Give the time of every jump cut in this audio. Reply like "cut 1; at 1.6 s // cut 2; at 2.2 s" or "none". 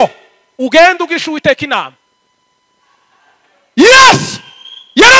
cut 1; at 3.2 s